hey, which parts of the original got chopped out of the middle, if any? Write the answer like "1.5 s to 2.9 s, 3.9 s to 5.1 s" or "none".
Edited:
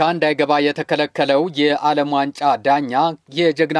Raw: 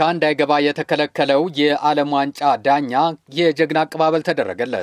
none